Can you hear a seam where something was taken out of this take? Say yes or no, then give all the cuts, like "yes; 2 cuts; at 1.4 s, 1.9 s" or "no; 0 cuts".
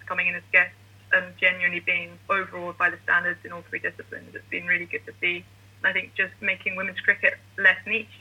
yes; 2 cuts; at 2.1 s, 6.3 s